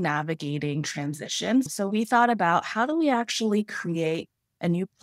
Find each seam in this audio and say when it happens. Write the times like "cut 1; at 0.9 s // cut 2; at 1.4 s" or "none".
cut 1; at 1.7 s